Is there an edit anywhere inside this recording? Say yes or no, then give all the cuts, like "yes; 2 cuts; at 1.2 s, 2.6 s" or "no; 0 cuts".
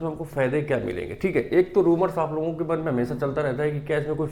no; 0 cuts